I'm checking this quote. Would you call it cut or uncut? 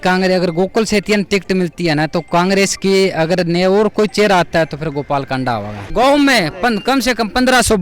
cut